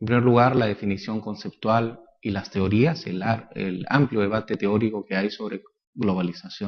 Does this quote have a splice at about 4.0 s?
no; 1 cut; at 5.4 s

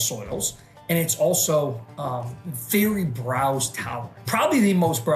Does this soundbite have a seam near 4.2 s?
yes; 1 cut; at 4.2 s

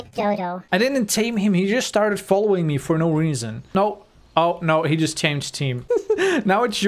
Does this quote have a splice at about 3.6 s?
yes; 1 cut; at 3.6 s

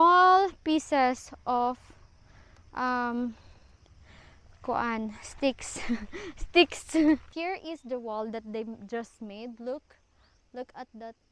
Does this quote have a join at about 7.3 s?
yes; 1 cut; at 7.3 s

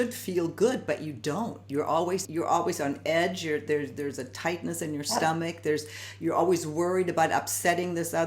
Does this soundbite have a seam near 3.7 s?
no; 1 cut; at 2.3 s

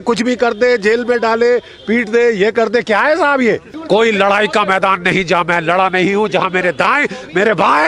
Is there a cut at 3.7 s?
yes; 1 cut; at 3.7 s

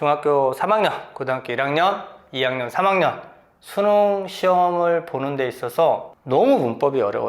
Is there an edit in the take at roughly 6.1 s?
yes; 1 cut; at 6.1 s

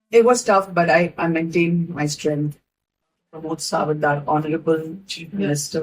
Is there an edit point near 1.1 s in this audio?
no; 1 cut; at 3.2 s

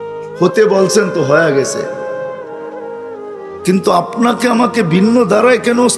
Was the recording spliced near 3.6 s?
yes; 2 cuts; at 2.0 s, 3.6 s

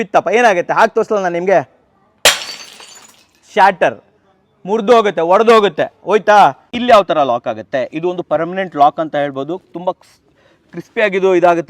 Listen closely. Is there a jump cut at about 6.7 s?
yes; 1 cut; at 6.7 s

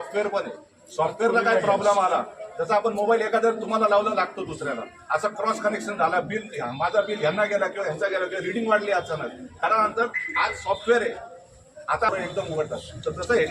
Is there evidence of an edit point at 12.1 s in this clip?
yes; 1 cut; at 12.1 s

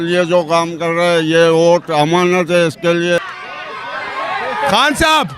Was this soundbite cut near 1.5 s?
no; 1 cut; at 3.3 s

